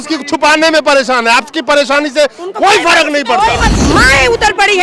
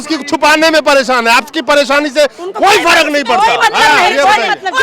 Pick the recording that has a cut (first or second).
first